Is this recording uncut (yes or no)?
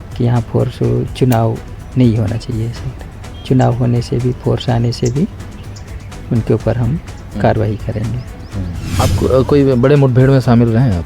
no